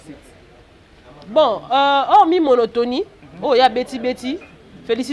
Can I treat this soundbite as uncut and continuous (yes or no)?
yes